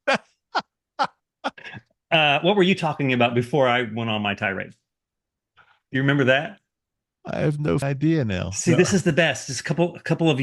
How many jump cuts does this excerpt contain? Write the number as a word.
one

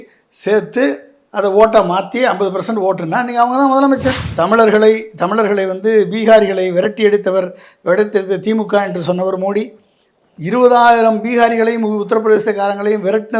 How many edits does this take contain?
one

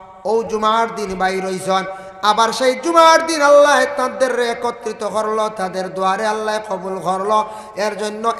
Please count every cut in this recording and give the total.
zero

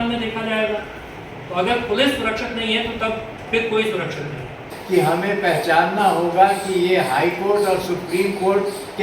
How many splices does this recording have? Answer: one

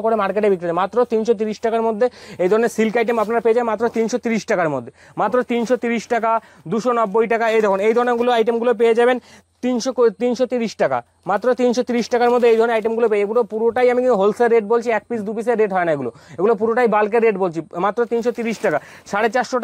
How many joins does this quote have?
zero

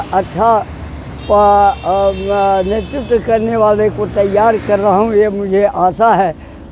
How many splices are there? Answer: zero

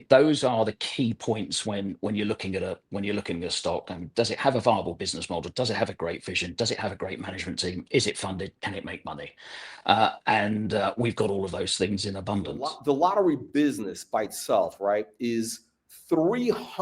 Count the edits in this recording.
one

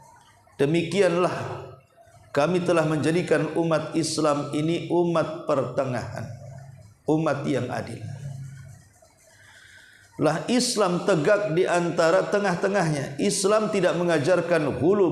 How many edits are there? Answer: one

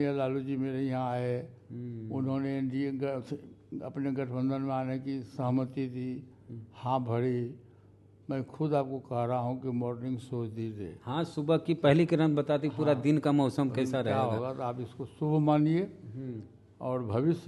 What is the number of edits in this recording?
zero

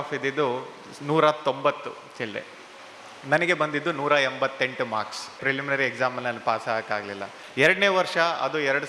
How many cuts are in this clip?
two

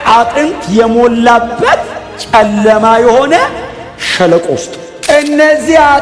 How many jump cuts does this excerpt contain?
one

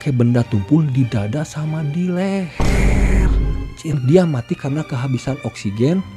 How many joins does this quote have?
one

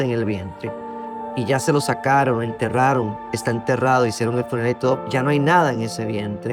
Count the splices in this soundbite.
one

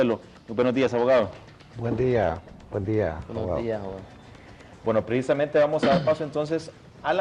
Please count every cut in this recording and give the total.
zero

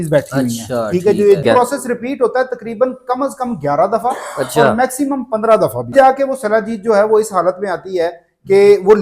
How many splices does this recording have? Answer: two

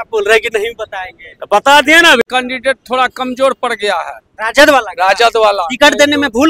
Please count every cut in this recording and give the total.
one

